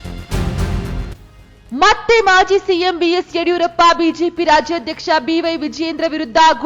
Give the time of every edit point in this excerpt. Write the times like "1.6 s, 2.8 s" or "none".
1.0 s